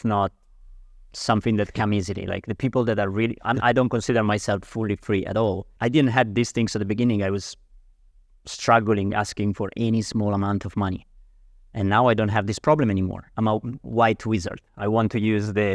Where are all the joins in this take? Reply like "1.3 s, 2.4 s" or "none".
5.7 s, 13.2 s